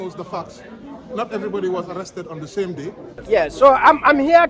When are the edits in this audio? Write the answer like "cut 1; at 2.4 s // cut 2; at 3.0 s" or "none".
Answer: cut 1; at 3.1 s